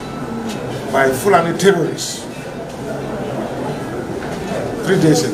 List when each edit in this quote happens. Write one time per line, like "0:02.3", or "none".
none